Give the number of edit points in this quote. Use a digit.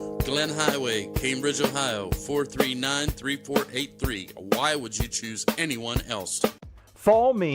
1